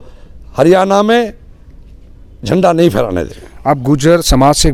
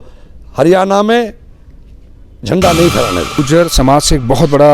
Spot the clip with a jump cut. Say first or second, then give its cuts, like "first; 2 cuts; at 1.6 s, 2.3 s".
second; 1 cut; at 3.4 s